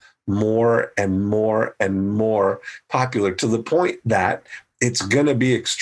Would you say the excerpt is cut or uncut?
uncut